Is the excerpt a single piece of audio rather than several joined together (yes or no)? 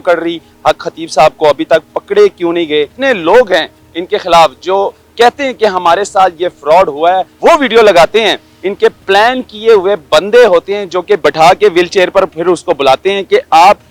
no